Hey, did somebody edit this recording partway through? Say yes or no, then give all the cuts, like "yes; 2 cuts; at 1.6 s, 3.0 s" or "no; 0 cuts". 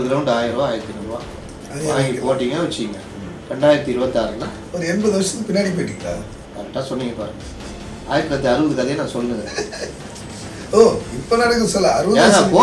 yes; 1 cut; at 6.4 s